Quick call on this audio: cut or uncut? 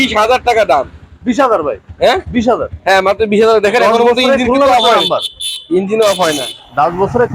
uncut